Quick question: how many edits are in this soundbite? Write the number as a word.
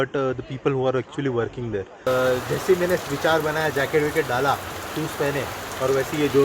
one